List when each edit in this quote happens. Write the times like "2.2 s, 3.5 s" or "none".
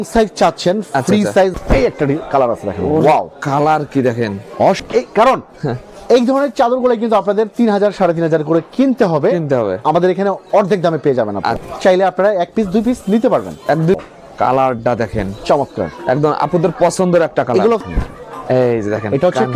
1.6 s, 4.8 s, 11.6 s, 14.0 s, 17.8 s